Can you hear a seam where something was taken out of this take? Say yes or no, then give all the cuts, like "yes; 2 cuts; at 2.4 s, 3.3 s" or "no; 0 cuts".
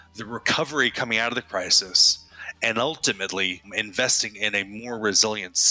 yes; 1 cut; at 3.7 s